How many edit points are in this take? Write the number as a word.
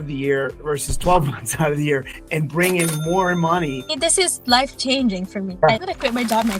two